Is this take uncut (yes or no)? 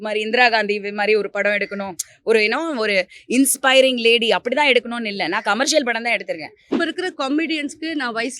no